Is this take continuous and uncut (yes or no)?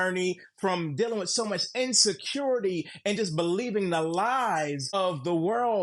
no